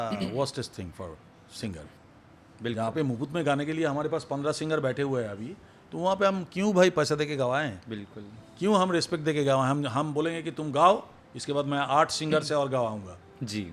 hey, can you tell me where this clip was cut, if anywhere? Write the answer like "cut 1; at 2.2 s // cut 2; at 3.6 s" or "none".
cut 1; at 2.0 s